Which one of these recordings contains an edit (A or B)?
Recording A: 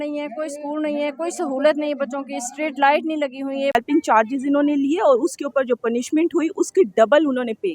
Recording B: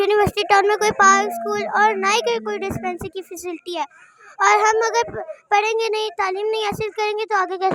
A